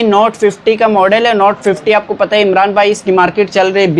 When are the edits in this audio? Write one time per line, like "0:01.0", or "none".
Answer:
none